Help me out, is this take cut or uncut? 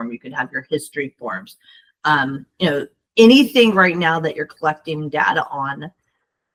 uncut